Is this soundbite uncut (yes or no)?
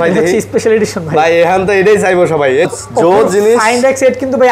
no